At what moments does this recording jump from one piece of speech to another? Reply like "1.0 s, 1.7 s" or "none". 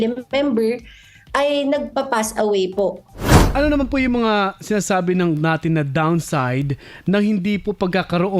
3.3 s